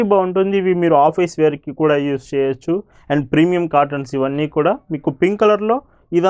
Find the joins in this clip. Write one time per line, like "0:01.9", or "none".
none